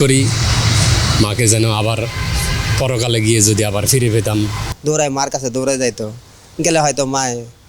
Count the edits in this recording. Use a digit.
1